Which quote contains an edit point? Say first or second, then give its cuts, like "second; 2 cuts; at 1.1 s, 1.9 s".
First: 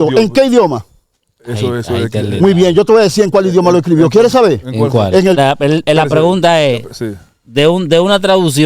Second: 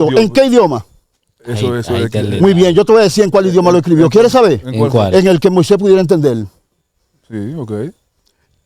first; 1 cut; at 5.4 s